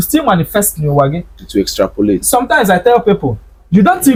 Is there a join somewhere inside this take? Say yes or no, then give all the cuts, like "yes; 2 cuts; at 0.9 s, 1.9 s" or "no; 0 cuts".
no; 0 cuts